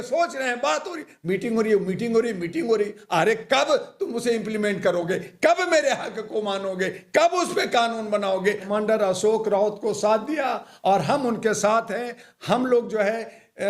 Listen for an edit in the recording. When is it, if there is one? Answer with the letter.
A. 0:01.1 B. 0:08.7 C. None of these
B